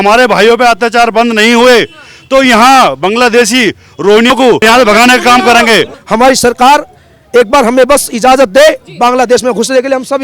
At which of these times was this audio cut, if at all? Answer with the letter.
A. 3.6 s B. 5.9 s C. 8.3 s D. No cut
B